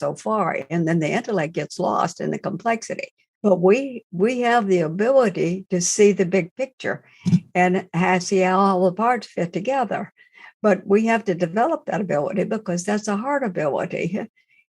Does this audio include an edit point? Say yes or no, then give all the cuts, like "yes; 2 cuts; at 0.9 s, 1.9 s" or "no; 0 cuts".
yes; 1 cut; at 3.4 s